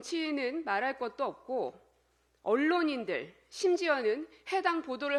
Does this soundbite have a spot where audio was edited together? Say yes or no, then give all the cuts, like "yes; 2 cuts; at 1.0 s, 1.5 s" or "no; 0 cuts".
no; 0 cuts